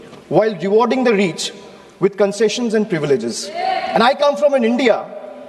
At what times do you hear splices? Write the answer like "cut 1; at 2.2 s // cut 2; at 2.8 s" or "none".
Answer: cut 1; at 3.8 s